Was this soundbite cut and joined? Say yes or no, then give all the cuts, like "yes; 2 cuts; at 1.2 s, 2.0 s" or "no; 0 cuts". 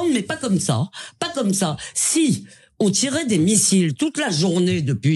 no; 0 cuts